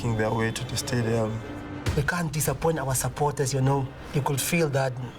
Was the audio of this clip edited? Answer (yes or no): yes